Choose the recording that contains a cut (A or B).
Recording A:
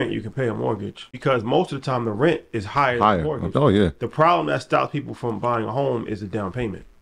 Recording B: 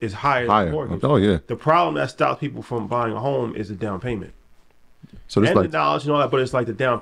A